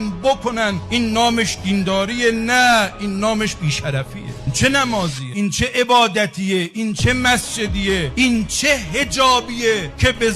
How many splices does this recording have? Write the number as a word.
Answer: two